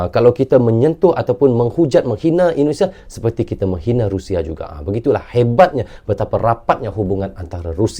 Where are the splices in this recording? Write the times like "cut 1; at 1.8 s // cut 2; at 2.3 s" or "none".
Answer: none